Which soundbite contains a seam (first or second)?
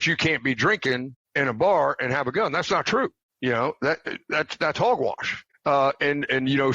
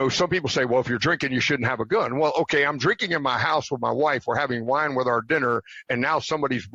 first